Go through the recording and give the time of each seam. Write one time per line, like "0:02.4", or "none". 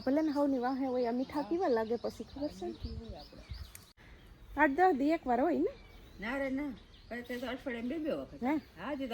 0:03.9